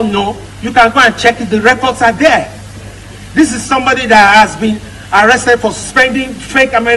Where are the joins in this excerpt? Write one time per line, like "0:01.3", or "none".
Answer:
0:05.6